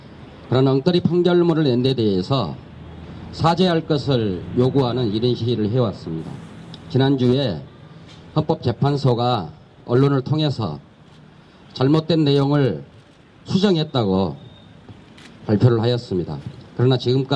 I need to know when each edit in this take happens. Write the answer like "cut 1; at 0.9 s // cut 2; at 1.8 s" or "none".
cut 1; at 9.3 s